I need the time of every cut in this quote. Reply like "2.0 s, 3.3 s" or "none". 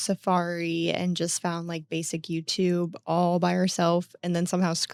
none